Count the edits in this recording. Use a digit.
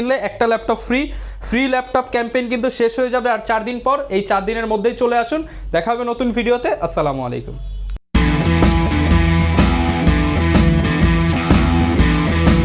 0